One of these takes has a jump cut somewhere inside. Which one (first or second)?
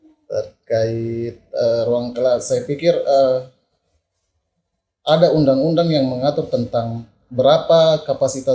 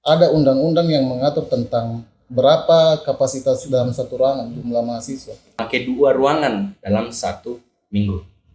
second